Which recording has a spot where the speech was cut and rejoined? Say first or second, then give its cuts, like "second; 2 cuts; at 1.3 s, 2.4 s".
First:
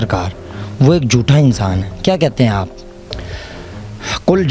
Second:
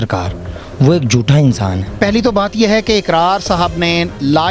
second; 1 cut; at 1.9 s